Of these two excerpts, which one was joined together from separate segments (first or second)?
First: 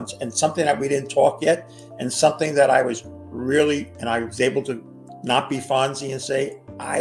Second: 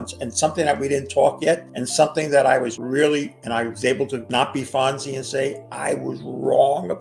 second